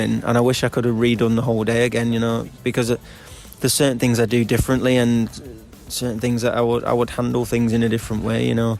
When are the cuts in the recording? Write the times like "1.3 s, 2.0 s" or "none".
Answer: none